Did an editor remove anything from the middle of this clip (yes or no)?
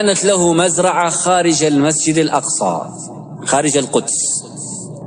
no